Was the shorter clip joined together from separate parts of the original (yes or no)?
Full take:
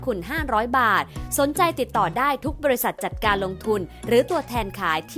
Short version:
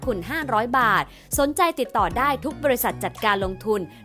no